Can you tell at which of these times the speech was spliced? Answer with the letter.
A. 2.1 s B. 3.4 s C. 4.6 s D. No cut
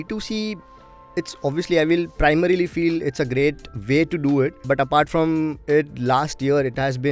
C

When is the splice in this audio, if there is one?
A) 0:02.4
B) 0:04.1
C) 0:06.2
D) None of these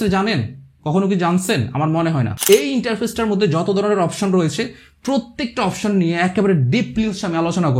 A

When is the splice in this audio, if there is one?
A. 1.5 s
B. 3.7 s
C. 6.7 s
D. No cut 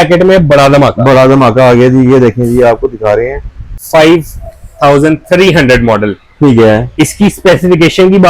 B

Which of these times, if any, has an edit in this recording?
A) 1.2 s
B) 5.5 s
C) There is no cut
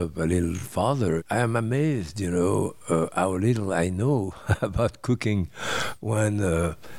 A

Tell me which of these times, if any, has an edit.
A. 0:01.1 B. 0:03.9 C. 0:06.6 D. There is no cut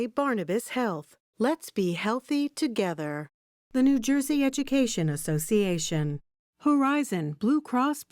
D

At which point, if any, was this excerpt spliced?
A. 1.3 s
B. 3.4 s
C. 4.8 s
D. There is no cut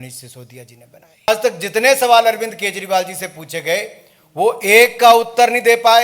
A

